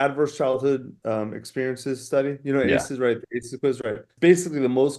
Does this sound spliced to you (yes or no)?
yes